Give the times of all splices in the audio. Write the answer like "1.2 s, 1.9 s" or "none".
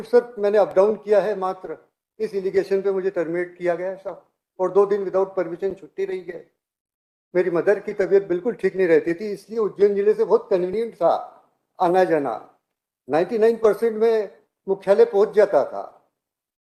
none